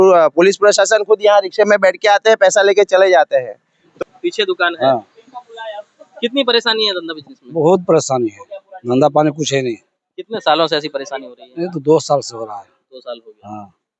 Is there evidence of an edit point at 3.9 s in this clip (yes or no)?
yes